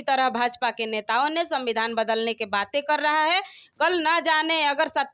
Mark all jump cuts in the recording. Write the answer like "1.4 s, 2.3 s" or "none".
none